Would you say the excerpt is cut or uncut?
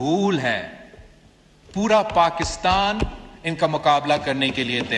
uncut